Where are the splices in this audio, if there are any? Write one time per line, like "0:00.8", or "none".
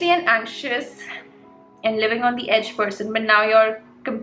none